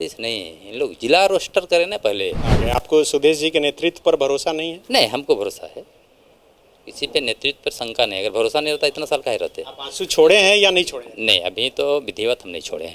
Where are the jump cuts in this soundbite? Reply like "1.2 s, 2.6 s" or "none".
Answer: 2.6 s